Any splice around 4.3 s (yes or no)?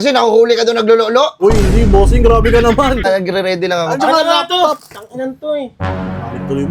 no